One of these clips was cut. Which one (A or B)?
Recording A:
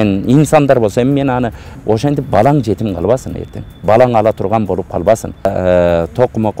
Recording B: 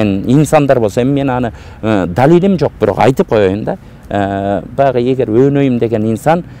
A